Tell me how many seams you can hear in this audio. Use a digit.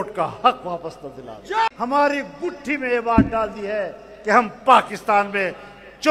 1